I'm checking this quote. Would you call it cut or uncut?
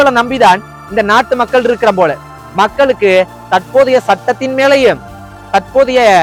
uncut